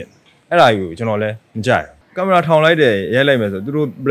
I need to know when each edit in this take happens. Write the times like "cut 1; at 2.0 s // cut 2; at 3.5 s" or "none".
cut 1; at 2.0 s